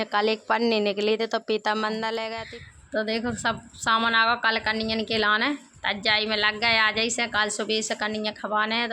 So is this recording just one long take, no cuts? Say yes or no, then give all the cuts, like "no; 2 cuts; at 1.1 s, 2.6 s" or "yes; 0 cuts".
no; 1 cut; at 2.4 s